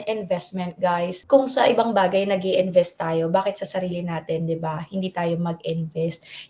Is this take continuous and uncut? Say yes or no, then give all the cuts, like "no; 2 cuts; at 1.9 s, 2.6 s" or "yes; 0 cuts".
yes; 0 cuts